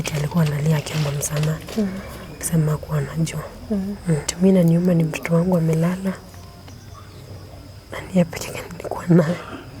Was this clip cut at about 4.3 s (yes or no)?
yes